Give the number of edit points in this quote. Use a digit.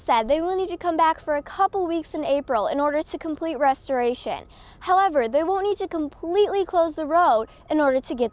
0